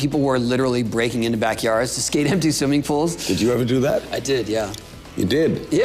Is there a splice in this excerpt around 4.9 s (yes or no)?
no